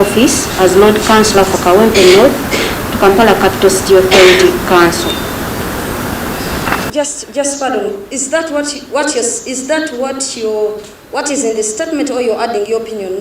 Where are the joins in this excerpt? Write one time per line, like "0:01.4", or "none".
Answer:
0:06.9